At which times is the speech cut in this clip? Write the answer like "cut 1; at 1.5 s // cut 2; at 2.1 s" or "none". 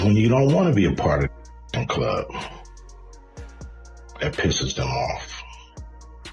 cut 1; at 5.3 s